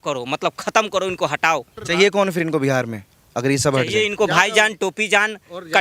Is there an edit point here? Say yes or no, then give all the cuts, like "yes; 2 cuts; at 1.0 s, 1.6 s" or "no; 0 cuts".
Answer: yes; 1 cut; at 1.8 s